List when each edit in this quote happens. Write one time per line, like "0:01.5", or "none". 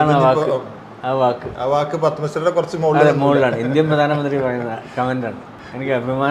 none